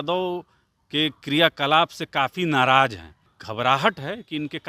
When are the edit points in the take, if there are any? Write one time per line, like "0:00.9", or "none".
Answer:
0:03.4